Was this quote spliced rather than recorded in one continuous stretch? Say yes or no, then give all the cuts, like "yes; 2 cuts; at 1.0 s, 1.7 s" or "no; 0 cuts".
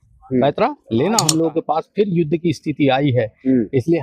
yes; 1 cut; at 1.3 s